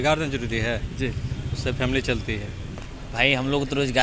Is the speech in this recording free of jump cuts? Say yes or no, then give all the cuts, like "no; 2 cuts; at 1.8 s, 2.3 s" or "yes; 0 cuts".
no; 1 cut; at 2.9 s